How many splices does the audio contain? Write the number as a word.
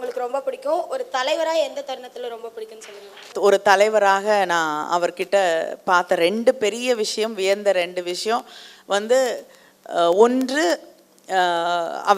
one